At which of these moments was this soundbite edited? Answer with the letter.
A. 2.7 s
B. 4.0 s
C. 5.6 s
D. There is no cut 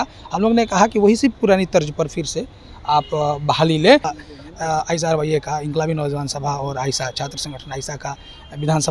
B